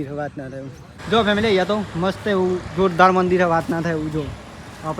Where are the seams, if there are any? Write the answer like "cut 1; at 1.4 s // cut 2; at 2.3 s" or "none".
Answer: cut 1; at 1.0 s